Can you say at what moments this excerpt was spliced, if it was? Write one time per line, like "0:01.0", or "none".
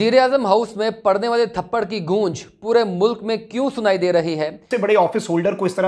0:04.6